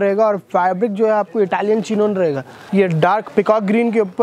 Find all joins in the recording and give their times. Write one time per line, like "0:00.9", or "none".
0:02.5